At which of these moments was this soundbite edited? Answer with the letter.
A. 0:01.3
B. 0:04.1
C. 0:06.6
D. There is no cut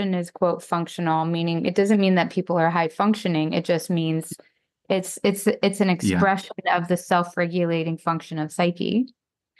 D